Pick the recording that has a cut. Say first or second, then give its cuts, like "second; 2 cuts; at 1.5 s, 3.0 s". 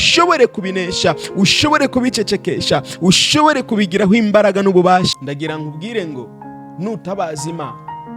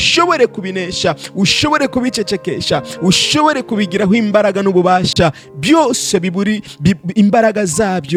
first; 1 cut; at 5.1 s